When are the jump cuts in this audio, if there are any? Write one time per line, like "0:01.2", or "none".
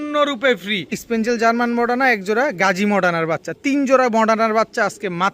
0:01.0